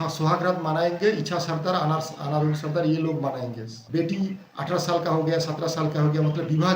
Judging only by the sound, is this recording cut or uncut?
cut